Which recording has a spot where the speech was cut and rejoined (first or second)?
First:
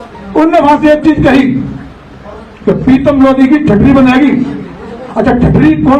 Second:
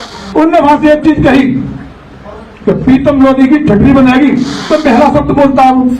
second